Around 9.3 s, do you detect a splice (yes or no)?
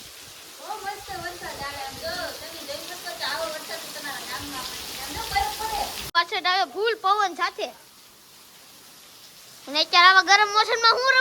no